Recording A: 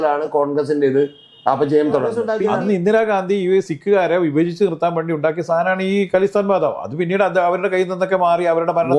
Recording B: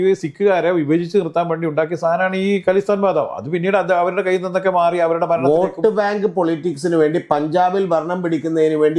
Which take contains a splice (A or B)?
A